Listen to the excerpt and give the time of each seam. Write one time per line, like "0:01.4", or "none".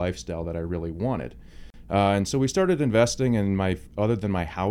none